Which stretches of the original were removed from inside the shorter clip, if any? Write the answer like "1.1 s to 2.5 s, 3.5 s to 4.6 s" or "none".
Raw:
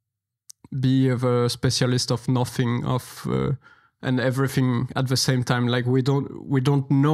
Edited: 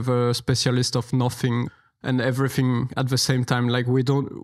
2.8 s to 3.7 s

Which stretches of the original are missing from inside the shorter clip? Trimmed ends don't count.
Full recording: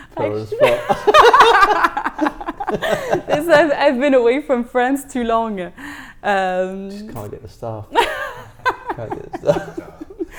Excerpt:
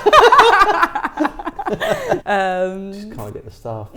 3.2 s to 6.2 s

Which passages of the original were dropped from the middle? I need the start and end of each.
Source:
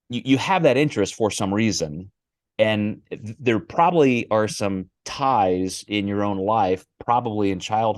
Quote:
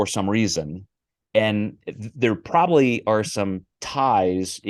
none

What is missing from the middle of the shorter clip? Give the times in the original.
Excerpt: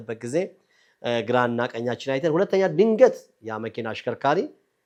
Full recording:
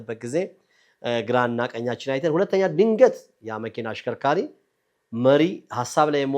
none

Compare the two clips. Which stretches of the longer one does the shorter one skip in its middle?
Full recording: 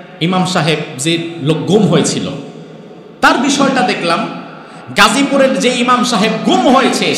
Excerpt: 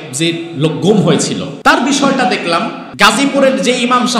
2.3 s to 3.1 s, 4.4 s to 4.8 s

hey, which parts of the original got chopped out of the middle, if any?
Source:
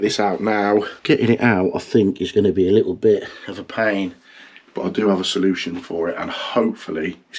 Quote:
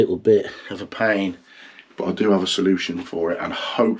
none

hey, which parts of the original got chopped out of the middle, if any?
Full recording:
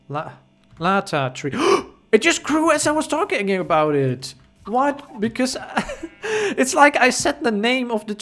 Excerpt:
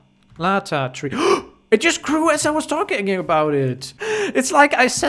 4.3 s to 6.1 s

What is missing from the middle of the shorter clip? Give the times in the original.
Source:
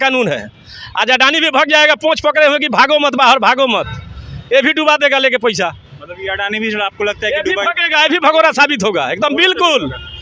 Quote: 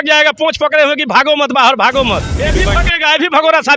4.0 s to 7.3 s

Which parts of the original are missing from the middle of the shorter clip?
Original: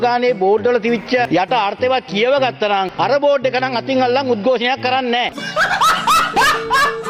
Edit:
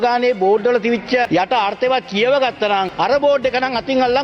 none

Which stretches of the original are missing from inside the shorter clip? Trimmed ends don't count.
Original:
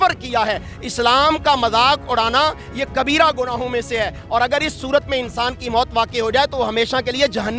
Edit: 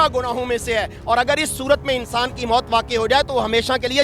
none

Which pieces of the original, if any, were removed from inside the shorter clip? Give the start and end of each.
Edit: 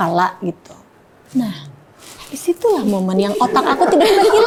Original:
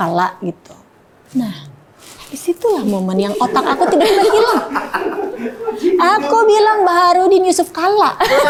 none

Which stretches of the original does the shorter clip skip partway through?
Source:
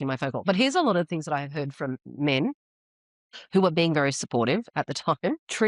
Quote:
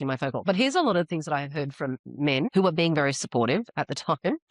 2.5 s to 3.5 s

